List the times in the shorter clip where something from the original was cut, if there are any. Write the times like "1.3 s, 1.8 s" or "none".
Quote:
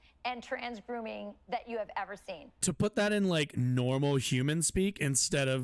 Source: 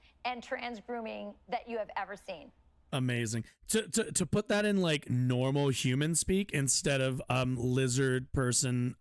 2.6 s